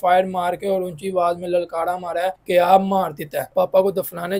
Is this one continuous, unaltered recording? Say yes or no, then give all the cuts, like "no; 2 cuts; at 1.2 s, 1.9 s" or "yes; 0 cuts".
no; 2 cuts; at 2.4 s, 3.5 s